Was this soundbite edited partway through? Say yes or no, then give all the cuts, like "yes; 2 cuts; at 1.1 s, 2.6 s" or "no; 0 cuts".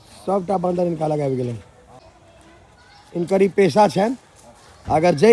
yes; 1 cut; at 2.0 s